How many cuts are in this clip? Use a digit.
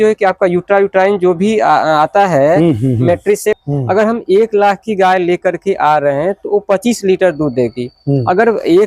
1